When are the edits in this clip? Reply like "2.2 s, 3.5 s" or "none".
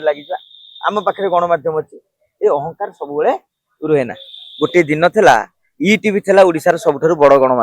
none